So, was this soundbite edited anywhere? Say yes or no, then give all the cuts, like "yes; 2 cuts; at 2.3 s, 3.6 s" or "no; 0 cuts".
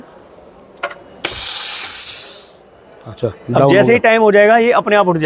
no; 0 cuts